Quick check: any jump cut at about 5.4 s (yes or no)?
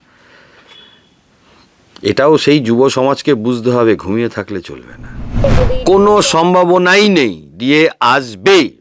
yes